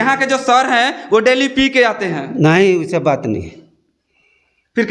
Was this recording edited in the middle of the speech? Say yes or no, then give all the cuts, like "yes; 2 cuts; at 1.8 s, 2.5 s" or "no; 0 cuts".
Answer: no; 0 cuts